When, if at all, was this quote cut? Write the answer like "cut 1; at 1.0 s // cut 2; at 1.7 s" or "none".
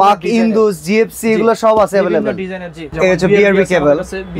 cut 1; at 2.8 s